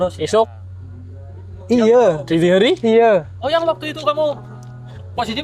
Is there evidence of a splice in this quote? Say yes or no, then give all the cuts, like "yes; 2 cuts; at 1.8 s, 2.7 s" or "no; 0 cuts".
no; 0 cuts